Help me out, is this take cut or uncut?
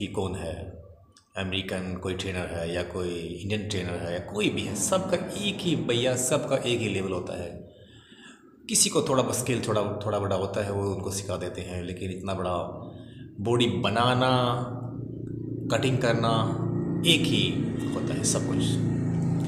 uncut